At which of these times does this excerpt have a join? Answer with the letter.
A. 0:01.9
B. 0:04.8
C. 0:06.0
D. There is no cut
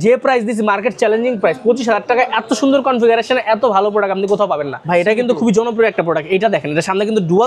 B